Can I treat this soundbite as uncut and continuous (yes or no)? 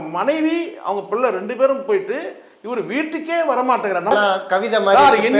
no